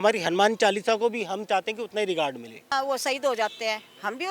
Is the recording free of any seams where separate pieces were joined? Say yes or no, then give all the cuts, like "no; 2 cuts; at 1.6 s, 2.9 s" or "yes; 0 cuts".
no; 1 cut; at 2.7 s